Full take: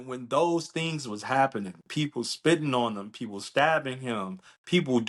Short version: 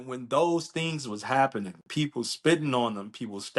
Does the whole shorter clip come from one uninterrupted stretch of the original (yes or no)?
yes